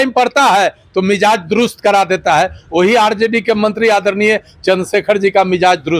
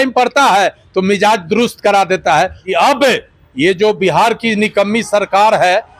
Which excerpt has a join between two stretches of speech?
second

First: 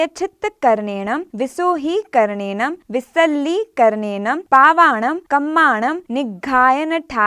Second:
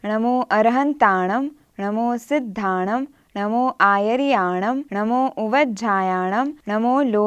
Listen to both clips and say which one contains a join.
first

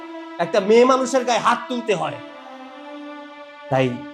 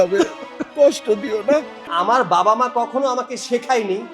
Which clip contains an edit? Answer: second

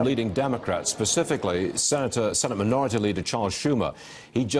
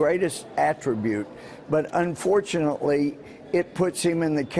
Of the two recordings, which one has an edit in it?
first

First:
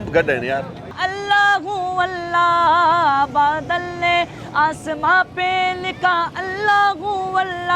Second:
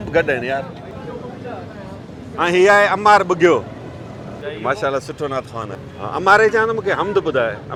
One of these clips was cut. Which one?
first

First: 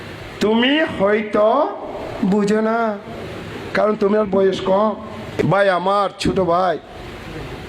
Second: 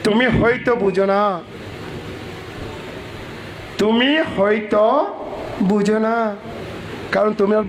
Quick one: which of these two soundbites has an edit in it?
first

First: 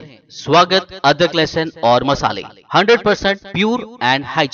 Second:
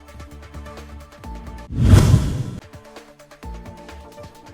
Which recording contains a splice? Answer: second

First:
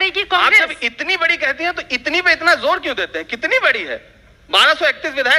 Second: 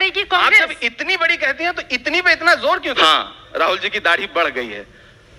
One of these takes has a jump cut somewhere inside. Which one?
second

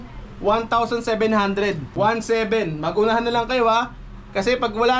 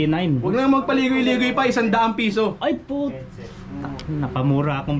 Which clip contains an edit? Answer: first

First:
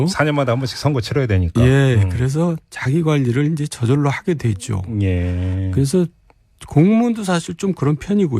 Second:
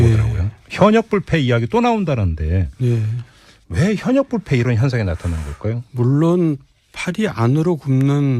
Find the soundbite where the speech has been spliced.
first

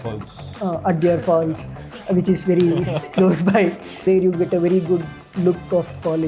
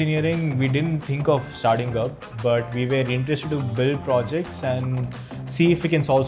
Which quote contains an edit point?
first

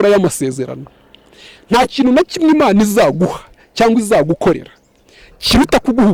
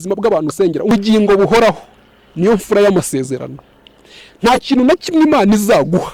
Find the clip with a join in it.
second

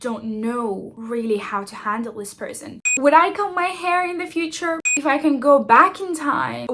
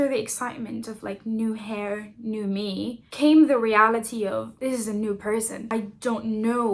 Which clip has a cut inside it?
first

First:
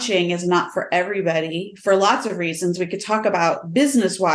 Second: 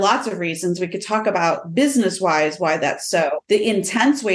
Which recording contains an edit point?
second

